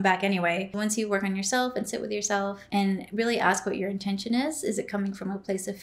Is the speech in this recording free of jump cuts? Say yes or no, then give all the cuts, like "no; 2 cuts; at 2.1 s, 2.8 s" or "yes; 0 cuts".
no; 2 cuts; at 0.8 s, 2.6 s